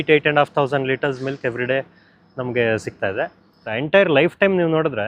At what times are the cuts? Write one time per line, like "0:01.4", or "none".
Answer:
0:03.7